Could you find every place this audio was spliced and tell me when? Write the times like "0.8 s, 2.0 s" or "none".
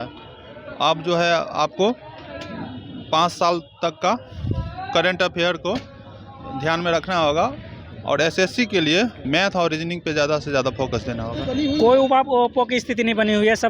11.4 s